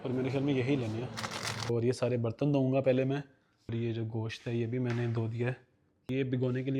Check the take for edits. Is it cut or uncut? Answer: cut